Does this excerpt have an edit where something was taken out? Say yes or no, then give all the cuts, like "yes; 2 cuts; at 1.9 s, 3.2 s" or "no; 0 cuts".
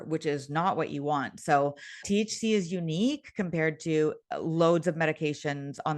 yes; 1 cut; at 2.0 s